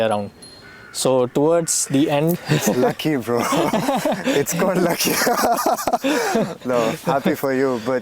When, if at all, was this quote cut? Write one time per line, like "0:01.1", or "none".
none